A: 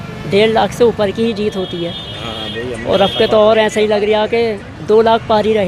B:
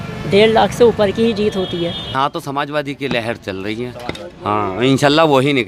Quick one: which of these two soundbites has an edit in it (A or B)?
B